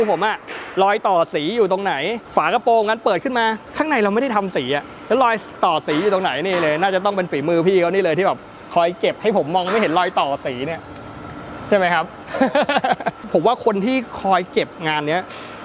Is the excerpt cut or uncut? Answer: cut